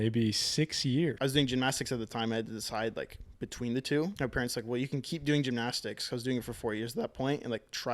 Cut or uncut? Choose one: cut